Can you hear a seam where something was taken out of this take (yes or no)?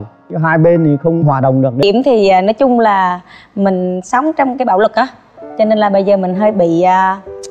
yes